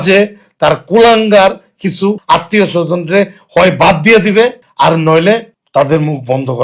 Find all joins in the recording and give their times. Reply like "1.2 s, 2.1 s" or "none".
2.2 s, 4.6 s, 5.6 s